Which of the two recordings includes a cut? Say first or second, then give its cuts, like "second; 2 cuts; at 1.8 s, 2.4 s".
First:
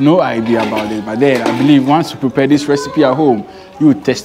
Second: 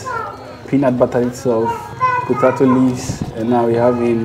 second; 1 cut; at 1.9 s